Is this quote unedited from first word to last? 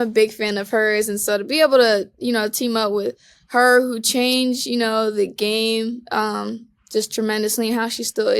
yes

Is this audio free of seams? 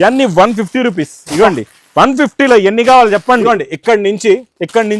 no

